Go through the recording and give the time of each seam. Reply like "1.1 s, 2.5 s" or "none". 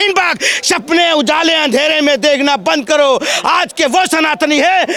none